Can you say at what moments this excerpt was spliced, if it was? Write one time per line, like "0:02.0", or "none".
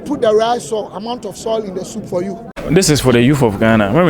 0:02.5